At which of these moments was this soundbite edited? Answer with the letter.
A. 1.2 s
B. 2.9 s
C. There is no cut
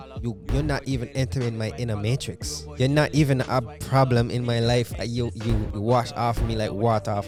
C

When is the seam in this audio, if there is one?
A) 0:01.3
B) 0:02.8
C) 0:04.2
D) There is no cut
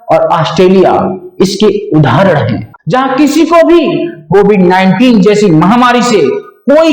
B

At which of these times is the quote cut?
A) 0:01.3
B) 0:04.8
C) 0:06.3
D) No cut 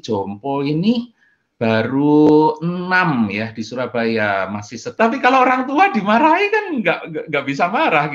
B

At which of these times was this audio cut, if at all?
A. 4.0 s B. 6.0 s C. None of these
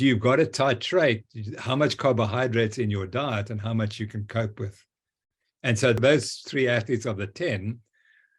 B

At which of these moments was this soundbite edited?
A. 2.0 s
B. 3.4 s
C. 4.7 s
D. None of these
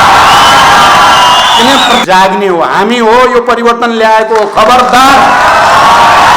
A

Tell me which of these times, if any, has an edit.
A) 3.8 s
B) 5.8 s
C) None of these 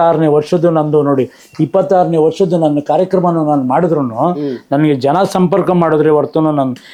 C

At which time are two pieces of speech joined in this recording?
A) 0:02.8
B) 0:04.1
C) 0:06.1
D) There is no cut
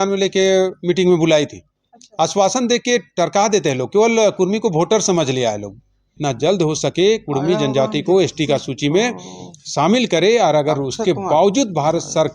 C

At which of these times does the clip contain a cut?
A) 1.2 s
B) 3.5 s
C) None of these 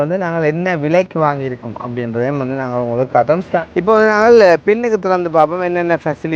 B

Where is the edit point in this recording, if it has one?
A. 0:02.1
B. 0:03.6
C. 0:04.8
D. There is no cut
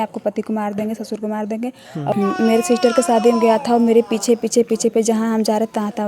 A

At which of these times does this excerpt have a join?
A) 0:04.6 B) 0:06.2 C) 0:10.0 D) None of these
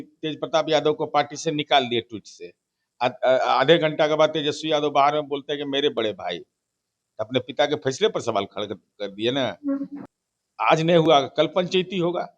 C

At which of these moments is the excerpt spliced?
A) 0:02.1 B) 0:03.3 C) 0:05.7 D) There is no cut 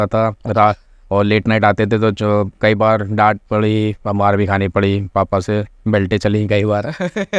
D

